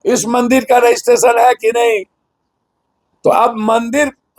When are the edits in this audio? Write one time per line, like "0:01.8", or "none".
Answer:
none